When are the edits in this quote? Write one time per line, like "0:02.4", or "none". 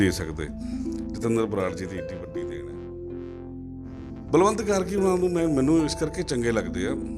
0:02.0
0:04.0